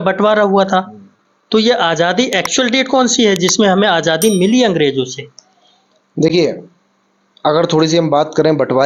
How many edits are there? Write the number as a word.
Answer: zero